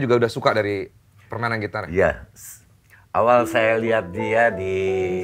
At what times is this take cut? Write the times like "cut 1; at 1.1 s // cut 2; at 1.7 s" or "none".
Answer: none